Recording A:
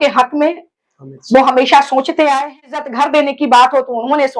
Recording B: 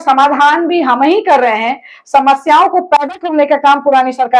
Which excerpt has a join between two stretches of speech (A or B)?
A